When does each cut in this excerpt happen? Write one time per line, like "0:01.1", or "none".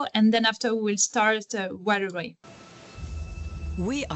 0:02.4